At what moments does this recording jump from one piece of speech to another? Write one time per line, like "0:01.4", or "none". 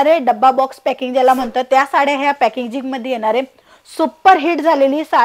none